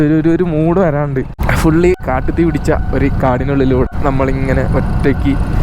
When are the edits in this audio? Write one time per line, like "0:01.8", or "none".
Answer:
0:01.4
0:02.0
0:03.9